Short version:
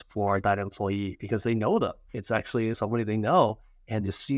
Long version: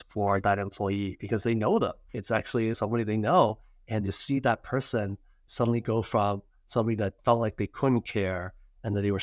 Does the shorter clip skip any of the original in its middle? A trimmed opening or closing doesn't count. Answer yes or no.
no